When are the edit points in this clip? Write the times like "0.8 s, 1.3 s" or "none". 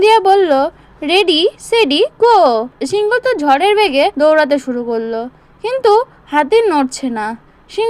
2.8 s, 4.1 s